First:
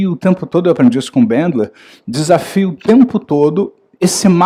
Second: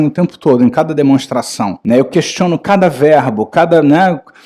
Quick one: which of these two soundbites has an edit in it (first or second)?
second